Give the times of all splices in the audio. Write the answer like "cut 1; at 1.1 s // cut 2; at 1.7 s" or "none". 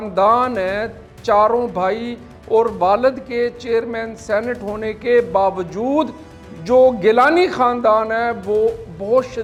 none